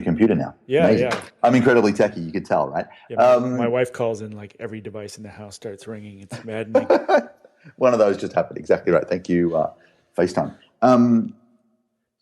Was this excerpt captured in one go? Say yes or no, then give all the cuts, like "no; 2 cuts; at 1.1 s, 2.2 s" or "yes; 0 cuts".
no; 1 cut; at 1.3 s